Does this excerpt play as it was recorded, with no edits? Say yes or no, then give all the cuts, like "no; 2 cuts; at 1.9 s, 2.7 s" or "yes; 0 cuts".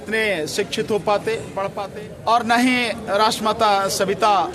no; 1 cut; at 1.8 s